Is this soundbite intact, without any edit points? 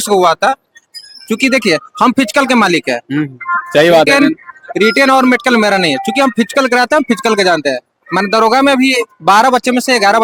yes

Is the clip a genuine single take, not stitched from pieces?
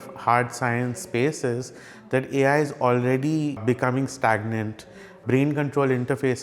no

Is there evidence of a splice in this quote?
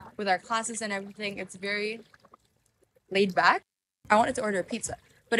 yes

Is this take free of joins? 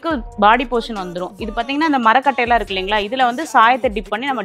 yes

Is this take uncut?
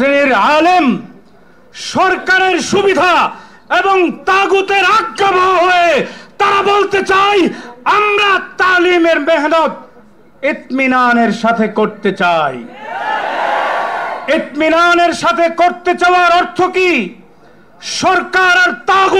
yes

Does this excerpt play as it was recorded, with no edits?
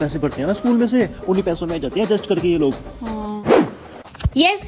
no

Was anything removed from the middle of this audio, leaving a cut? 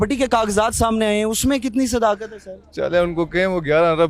no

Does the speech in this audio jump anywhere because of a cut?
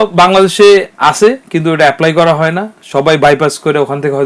no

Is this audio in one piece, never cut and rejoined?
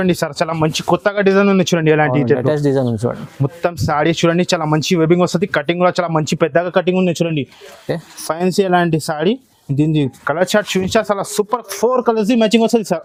yes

